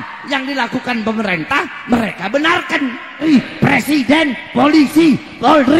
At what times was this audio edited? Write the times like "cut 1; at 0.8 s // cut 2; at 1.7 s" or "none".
cut 1; at 3.2 s